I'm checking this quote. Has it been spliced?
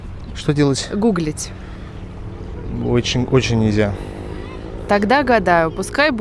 no; 0 cuts

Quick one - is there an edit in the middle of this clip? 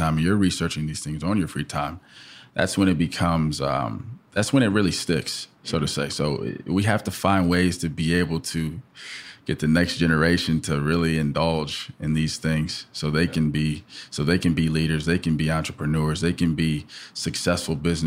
no; 0 cuts

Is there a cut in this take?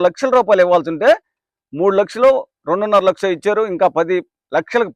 no; 0 cuts

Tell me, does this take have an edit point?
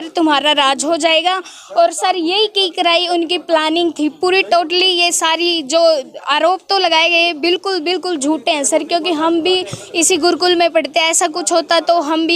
no; 0 cuts

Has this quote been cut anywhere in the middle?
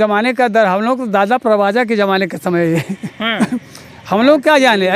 no; 0 cuts

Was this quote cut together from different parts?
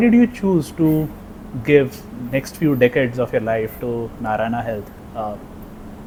no; 0 cuts

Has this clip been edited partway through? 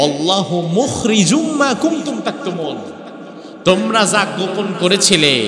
no; 0 cuts

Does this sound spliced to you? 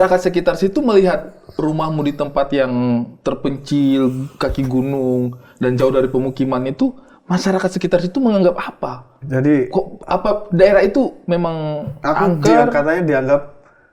no; 0 cuts

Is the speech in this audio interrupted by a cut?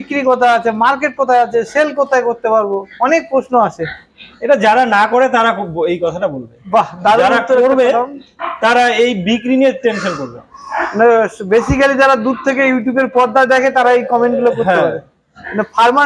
no; 0 cuts

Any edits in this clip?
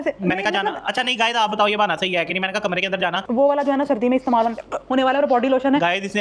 yes; 1 cut; at 3.2 s

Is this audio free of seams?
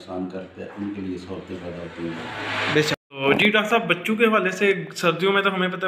no; 1 cut; at 3.0 s

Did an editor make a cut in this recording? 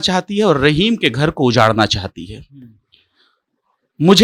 no; 0 cuts

